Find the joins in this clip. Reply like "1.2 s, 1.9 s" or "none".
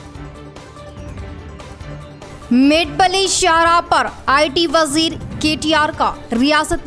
1.0 s